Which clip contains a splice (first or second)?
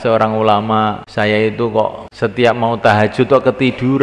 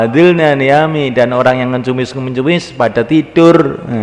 first